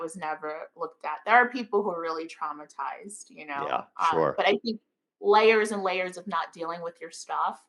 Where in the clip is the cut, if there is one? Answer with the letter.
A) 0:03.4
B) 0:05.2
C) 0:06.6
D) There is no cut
D